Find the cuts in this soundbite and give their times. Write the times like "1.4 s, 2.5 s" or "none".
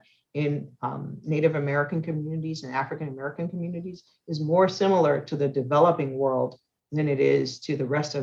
none